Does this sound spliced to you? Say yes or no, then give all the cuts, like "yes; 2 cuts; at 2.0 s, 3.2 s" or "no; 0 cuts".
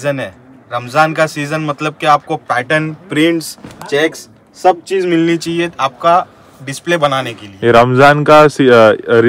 no; 0 cuts